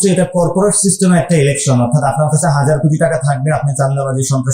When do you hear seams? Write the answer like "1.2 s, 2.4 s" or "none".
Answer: none